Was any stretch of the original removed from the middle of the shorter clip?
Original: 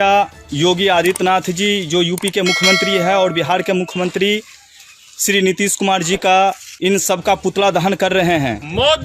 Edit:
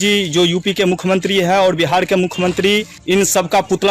yes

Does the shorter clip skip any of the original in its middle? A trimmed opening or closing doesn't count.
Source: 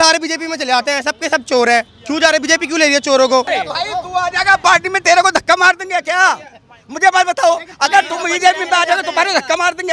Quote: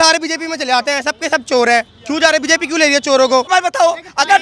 yes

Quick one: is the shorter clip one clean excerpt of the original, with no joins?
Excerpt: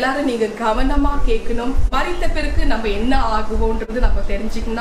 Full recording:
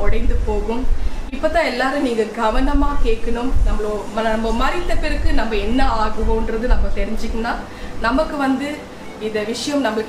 no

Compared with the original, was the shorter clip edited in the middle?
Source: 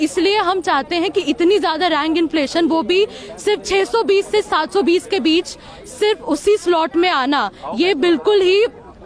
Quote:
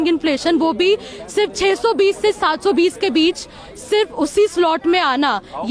no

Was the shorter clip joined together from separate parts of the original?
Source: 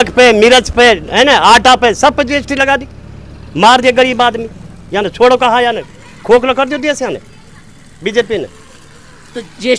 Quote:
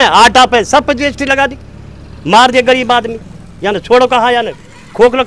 no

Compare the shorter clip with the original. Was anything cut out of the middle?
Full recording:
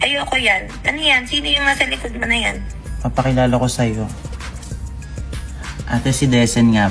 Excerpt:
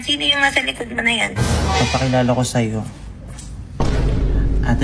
no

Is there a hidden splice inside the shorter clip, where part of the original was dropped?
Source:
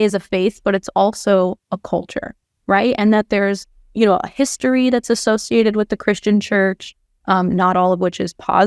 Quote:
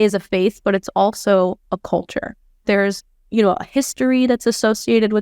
yes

